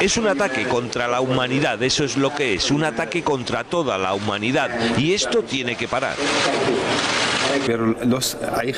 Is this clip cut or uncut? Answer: uncut